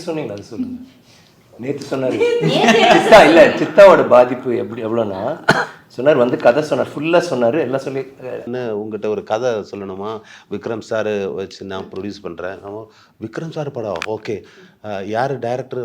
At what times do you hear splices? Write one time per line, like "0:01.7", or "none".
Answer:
0:08.5